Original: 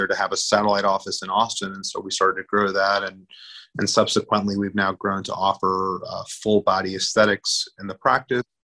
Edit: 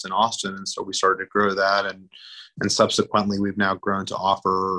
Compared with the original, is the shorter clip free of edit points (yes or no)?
yes